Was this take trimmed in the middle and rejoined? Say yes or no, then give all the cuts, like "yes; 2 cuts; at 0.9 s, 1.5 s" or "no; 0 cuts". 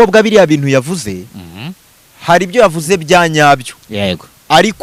no; 0 cuts